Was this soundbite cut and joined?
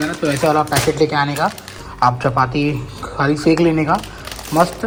no; 0 cuts

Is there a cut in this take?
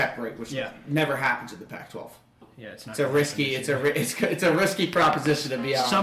yes; 1 cut; at 2.6 s

